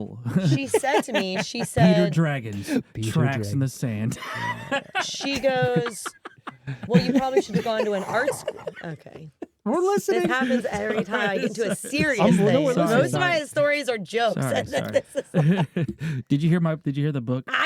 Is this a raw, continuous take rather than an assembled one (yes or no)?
yes